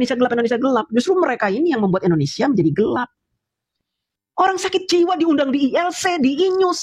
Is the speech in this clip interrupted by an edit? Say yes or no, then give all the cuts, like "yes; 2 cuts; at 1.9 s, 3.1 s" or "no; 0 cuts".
yes; 1 cut; at 3.6 s